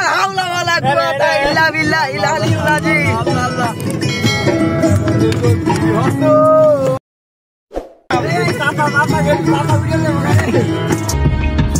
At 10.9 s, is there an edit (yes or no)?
no